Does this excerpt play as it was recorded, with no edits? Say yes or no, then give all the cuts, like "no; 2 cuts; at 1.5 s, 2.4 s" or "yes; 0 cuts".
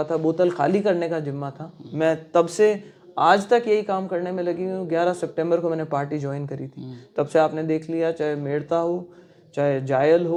yes; 0 cuts